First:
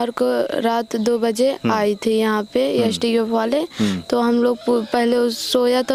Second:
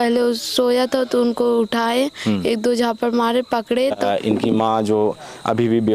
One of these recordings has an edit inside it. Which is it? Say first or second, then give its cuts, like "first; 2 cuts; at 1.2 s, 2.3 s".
second; 1 cut; at 4.0 s